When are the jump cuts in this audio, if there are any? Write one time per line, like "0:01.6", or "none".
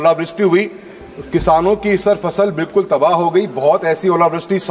none